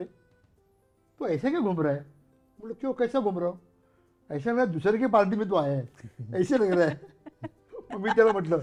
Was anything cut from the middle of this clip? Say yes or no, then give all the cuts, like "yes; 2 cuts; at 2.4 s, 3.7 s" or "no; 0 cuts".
no; 0 cuts